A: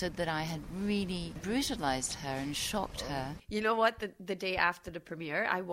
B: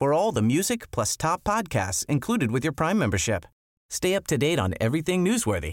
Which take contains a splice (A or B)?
A